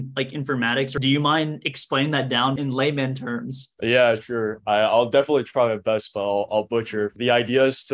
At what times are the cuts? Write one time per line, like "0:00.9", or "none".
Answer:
0:00.9
0:02.6
0:03.6
0:07.1